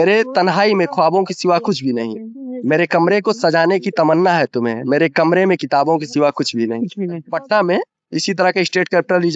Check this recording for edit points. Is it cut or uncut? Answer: cut